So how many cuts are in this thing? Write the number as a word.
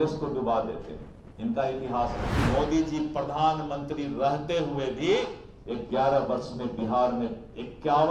one